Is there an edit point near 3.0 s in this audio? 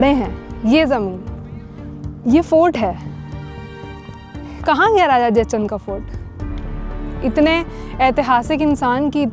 no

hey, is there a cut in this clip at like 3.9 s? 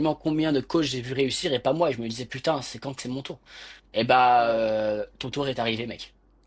no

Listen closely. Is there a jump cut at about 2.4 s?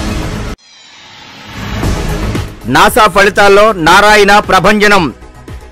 yes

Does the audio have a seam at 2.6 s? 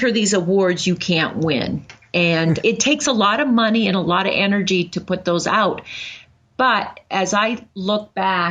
yes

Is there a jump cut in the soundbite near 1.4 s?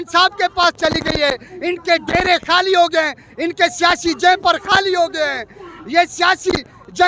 no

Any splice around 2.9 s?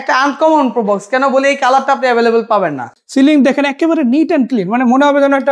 yes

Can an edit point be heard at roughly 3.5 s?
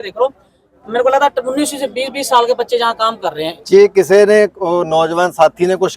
yes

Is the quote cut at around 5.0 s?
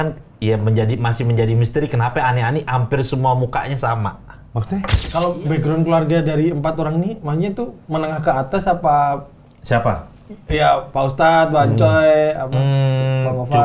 yes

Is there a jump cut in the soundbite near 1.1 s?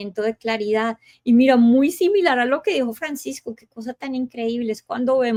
no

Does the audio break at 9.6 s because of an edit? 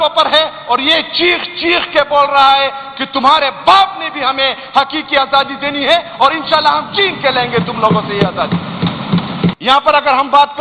yes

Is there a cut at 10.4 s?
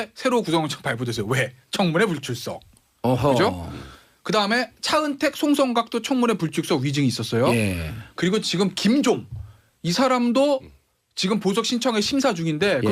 no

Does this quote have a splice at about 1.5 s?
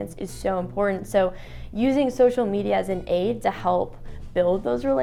no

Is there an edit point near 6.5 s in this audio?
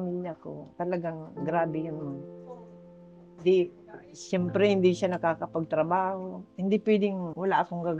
yes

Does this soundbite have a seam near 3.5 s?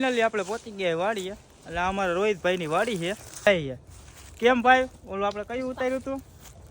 yes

